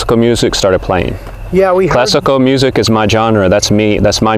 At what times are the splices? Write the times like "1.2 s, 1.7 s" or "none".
none

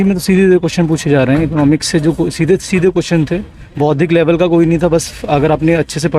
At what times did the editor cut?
none

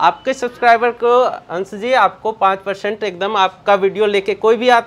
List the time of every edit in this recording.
none

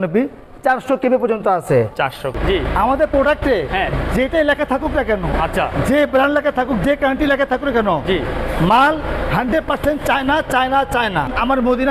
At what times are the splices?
none

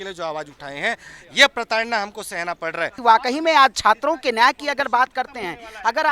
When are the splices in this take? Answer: 3.0 s

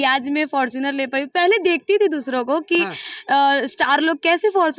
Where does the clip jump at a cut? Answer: none

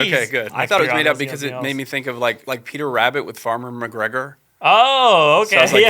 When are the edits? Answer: 0.8 s, 2.4 s

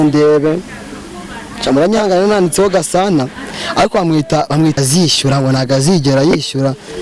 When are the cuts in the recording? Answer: 4.8 s

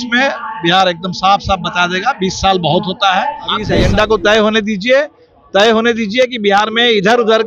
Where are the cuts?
3.7 s

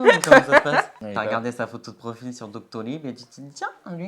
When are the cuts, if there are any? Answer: 1.0 s

